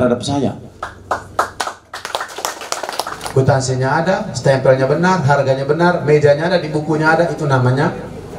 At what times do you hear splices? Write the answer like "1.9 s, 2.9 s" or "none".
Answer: 3.2 s

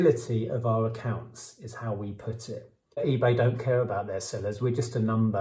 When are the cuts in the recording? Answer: 3.0 s

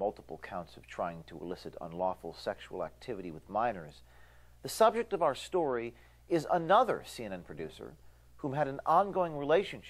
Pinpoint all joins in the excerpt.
1.2 s, 3.0 s

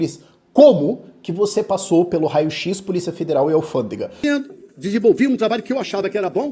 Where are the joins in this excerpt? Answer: 4.2 s

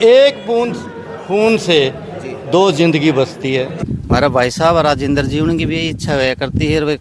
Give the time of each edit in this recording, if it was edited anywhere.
3.9 s

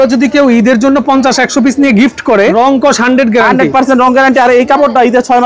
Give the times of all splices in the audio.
2.5 s

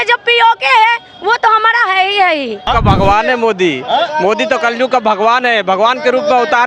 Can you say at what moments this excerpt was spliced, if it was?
2.6 s

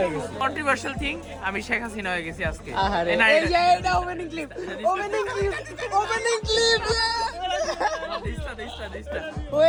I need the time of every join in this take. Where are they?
none

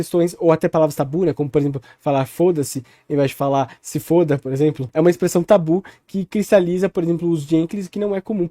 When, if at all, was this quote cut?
4.8 s

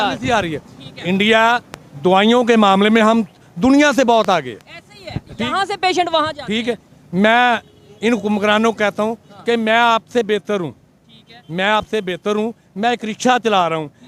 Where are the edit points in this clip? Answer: none

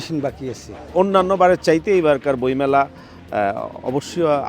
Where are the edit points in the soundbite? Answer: 0.9 s

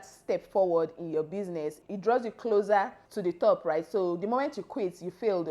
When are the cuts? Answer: 1.8 s, 3.0 s

